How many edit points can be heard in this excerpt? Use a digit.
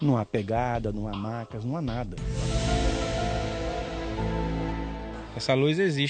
1